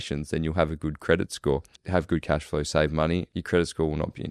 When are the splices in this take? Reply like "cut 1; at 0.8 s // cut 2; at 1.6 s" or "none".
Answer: cut 1; at 1.8 s // cut 2; at 3.3 s